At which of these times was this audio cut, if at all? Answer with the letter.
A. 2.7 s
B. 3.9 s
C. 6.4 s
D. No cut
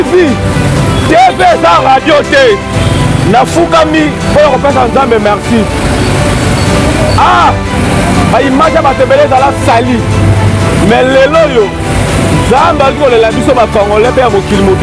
D